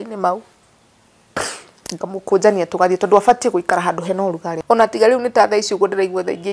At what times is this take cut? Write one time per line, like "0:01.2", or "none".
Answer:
0:04.5